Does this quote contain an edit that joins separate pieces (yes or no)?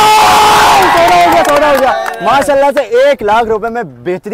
no